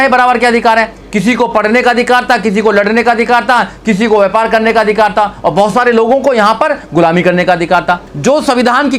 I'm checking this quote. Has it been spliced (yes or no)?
yes